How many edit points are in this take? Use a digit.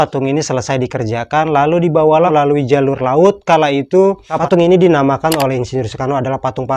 2